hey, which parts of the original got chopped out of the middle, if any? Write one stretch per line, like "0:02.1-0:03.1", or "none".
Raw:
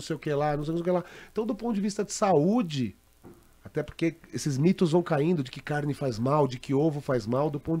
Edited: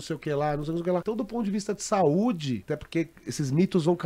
0:01.0-0:01.3
0:02.9-0:03.7